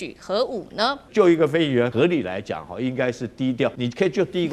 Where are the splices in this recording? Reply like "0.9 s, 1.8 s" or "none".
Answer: 1.1 s, 1.9 s, 3.8 s

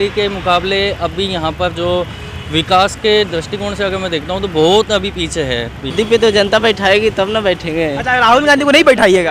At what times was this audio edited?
5.9 s

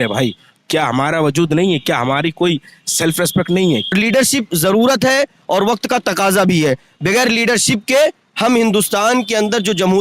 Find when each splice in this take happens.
3.9 s

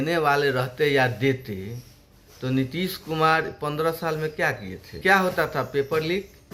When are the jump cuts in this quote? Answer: 5.0 s

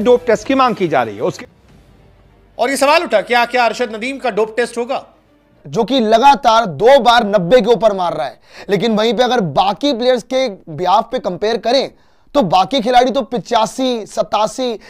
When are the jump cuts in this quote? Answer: 1.4 s, 5.6 s

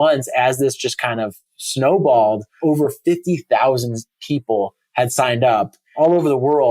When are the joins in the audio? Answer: 2.5 s, 5.8 s

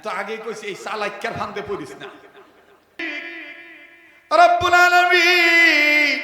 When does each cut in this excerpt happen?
3.1 s

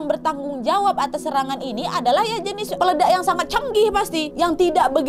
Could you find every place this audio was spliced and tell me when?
2.7 s, 4.3 s

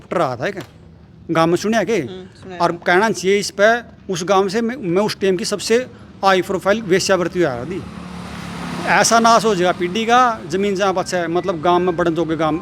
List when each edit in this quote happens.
none

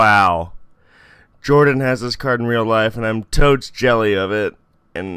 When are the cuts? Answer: 3.7 s

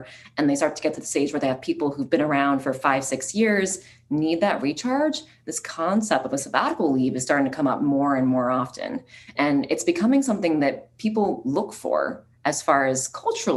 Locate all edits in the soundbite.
none

